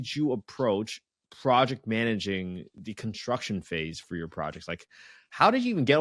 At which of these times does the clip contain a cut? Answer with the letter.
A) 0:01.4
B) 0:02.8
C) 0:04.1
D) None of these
B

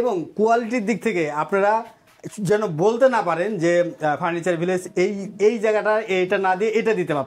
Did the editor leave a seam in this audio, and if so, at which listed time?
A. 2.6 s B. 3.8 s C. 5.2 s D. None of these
D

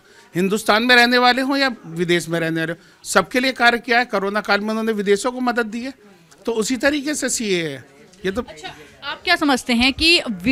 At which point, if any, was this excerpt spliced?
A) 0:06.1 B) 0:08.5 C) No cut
C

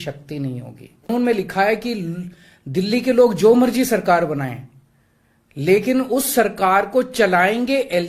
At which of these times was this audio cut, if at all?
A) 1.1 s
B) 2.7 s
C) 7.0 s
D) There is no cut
A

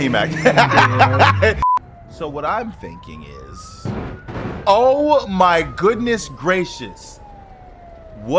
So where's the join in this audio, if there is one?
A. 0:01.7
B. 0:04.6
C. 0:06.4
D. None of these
A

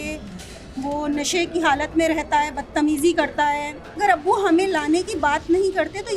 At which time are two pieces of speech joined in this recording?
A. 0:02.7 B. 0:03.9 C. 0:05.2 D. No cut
B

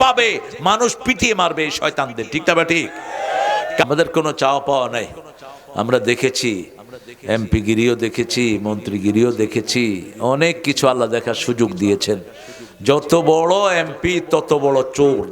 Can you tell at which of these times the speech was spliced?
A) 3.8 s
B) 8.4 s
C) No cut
A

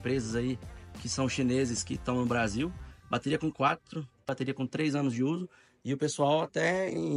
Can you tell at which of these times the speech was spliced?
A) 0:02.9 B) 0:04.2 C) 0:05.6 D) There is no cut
B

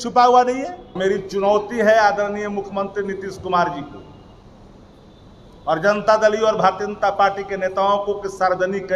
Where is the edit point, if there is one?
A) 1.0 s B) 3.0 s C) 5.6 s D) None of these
A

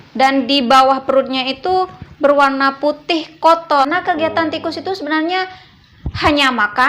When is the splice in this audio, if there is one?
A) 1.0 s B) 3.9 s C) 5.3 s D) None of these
B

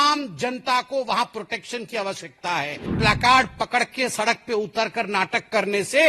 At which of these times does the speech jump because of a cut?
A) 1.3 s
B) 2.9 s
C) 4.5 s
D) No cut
B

